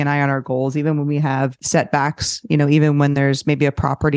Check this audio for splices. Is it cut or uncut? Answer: cut